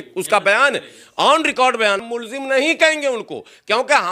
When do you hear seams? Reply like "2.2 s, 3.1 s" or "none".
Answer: 2.1 s